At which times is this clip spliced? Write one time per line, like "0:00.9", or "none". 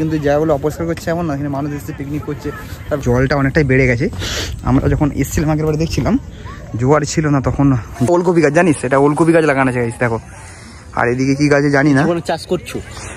0:03.0
0:08.1